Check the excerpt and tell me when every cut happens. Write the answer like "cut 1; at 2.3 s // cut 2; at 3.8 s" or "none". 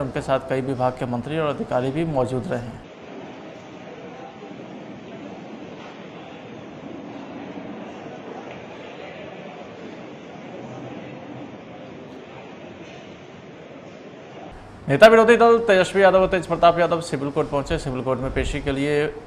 cut 1; at 14.8 s